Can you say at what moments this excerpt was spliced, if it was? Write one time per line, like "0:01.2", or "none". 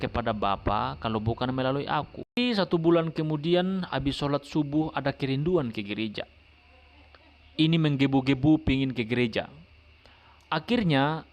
0:02.4